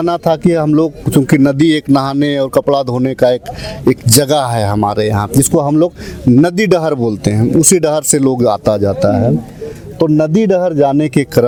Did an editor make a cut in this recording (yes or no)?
no